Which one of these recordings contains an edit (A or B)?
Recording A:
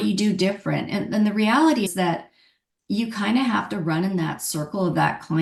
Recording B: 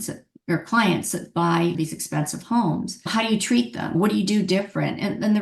B